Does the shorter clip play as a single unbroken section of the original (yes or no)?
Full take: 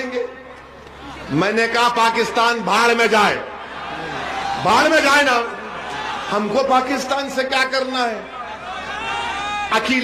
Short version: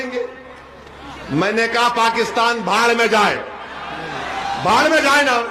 yes